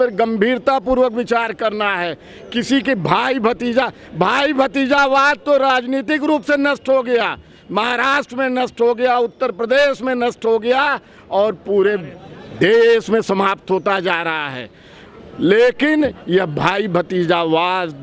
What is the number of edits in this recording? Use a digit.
0